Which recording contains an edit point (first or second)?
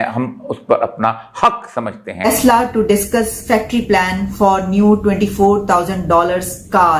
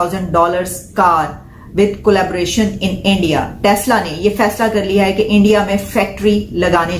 first